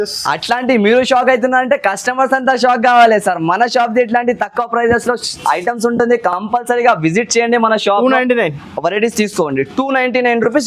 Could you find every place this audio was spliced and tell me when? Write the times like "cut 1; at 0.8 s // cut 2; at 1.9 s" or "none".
none